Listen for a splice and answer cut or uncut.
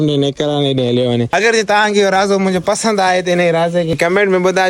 cut